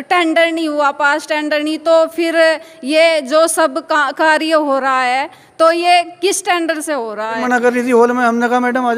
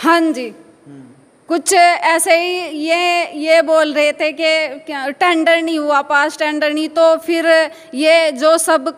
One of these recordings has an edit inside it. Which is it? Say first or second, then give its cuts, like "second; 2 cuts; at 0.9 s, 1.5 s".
first; 1 cut; at 7.4 s